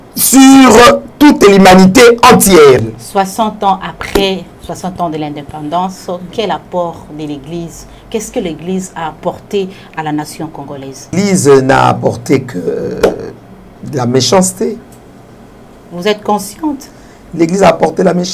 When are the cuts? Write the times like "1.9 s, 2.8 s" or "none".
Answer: 2.9 s, 11.1 s

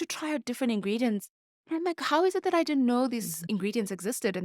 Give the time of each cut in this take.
3.3 s

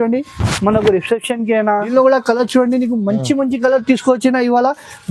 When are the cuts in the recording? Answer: 1.9 s

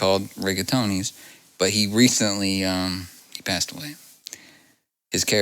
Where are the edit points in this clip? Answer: 3.2 s

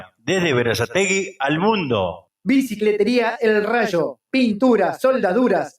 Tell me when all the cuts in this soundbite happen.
2.3 s

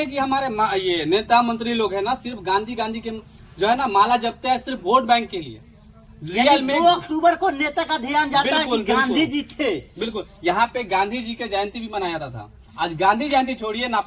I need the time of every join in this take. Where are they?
none

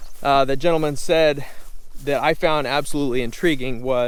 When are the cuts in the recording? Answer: none

